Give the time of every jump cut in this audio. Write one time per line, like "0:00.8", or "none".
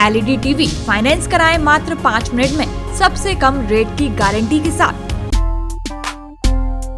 0:05.1